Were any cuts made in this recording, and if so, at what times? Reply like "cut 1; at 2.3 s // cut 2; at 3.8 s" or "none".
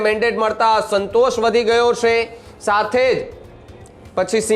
none